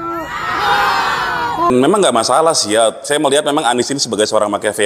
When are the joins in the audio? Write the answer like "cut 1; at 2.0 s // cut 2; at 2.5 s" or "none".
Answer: cut 1; at 1.7 s